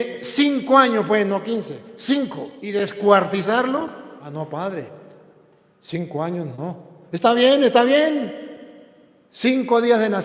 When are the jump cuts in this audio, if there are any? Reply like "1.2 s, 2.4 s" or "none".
2.6 s, 4.2 s

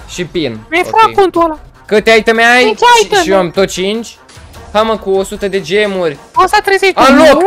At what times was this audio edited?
1.7 s

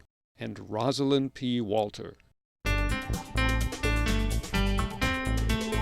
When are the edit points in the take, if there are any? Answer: 2.5 s

